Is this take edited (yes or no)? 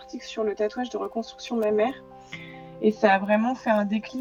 no